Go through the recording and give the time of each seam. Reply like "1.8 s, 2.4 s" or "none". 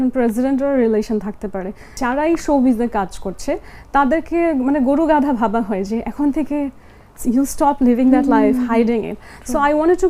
1.9 s